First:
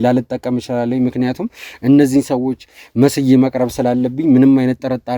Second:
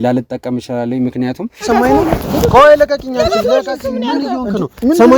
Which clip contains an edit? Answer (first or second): second